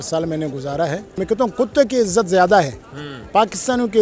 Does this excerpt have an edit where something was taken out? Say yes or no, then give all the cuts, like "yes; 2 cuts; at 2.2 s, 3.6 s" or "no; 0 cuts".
yes; 1 cut; at 1.2 s